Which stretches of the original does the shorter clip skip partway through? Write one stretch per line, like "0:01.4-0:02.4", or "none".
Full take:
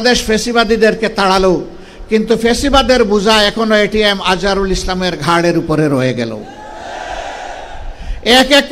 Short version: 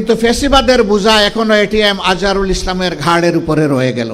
none